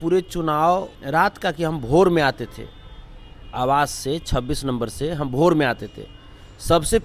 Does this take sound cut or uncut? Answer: cut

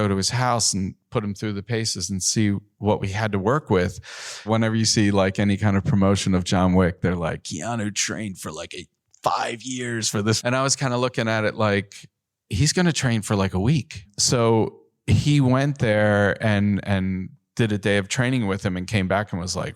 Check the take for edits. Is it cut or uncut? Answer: cut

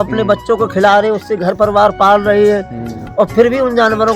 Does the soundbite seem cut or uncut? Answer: uncut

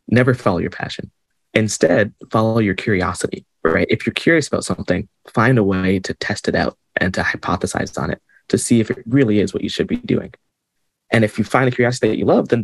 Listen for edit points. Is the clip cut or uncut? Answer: cut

